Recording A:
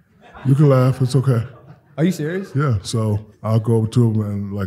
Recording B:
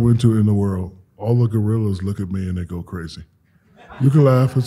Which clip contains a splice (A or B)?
A